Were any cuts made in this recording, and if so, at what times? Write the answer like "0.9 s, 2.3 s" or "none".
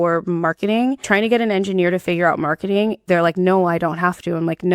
1.0 s, 3.0 s